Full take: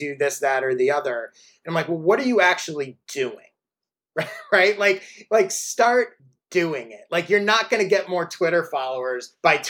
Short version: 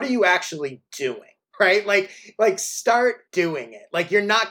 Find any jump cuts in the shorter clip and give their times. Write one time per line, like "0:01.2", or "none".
0:01.4
0:03.2